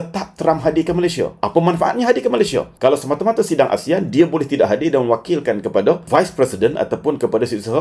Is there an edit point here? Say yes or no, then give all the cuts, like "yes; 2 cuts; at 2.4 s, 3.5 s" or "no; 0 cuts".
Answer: no; 0 cuts